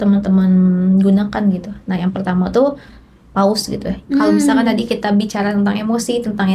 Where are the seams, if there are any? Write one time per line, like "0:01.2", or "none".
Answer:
0:03.9